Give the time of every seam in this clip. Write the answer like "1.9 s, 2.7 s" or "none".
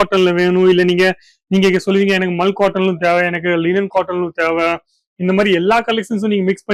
none